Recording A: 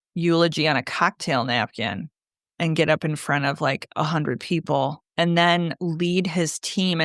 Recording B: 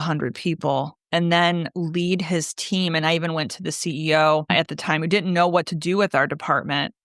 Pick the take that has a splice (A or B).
B